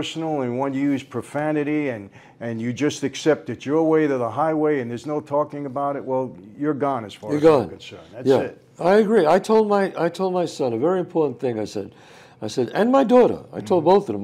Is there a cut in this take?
no; 0 cuts

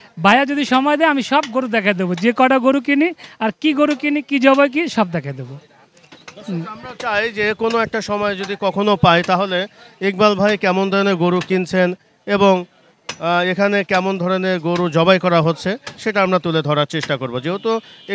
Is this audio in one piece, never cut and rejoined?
yes; 0 cuts

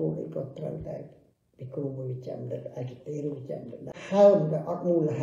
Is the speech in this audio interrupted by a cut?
yes; 1 cut; at 3.9 s

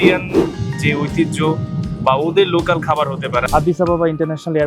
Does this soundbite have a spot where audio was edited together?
yes; 1 cut; at 3.4 s

